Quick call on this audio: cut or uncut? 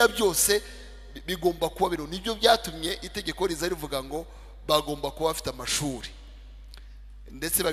uncut